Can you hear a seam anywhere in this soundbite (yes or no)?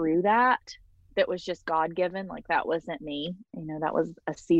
yes